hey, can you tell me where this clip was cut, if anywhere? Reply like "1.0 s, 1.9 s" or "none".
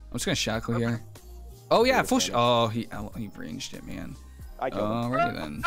none